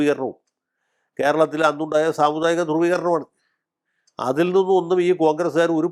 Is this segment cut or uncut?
uncut